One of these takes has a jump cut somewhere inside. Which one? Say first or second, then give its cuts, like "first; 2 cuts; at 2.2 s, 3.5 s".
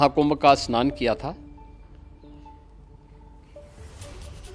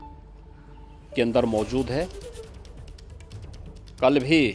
first; 1 cut; at 1.4 s